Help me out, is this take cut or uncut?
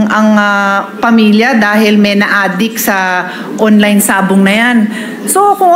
uncut